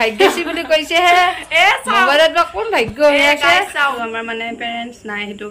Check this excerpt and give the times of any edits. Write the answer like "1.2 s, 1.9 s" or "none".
4.0 s